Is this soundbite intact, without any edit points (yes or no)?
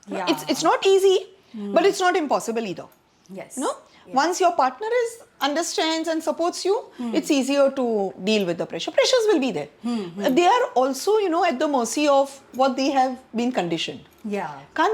yes